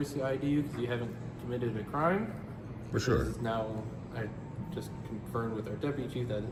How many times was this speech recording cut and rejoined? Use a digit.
0